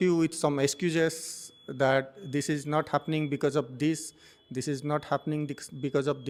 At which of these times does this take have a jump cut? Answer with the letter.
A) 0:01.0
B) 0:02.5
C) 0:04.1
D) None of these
D